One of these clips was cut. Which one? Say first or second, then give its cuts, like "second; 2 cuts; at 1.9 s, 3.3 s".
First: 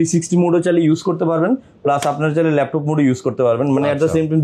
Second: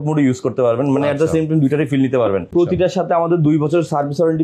second; 1 cut; at 2.5 s